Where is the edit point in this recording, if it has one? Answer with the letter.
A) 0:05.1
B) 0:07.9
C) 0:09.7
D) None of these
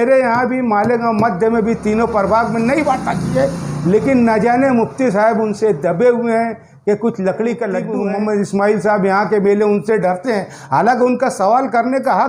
B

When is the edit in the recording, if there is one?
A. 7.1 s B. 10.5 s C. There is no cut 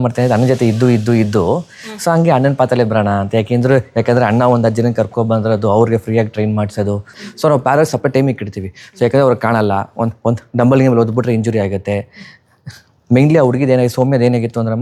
A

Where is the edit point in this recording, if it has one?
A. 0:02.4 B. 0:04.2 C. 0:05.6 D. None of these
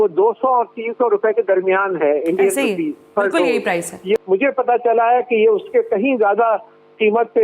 B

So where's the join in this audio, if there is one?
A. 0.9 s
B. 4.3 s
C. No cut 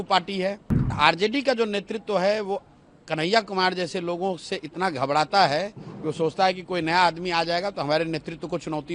A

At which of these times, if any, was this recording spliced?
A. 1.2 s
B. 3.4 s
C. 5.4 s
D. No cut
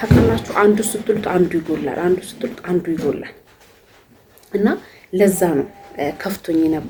D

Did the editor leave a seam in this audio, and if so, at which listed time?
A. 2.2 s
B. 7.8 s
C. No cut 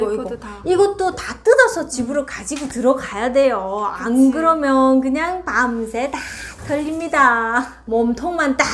B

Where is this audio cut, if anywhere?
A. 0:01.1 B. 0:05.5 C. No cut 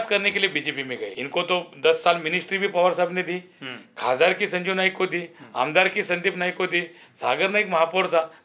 A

